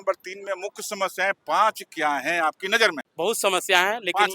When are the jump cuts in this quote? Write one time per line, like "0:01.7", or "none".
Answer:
0:03.0

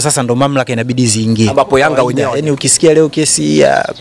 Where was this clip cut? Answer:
0:02.2

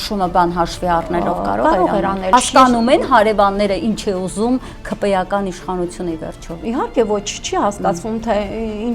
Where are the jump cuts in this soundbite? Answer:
0:02.3

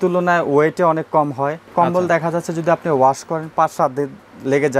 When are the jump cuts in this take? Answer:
0:01.7

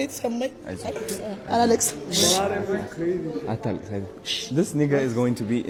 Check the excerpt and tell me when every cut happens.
none

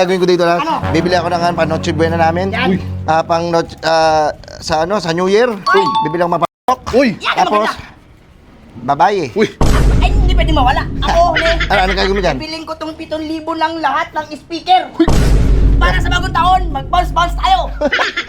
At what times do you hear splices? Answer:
none

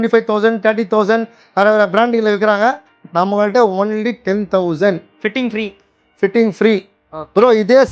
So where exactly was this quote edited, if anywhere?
none

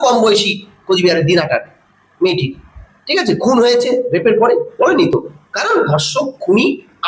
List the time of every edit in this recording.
none

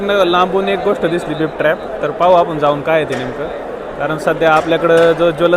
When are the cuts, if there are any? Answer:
none

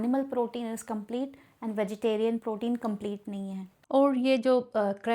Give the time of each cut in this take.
0:03.7

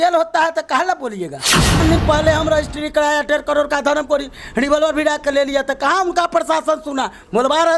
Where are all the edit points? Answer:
0:01.8

